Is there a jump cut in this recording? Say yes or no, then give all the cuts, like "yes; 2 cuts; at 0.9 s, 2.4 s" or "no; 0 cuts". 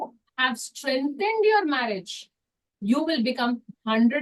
no; 0 cuts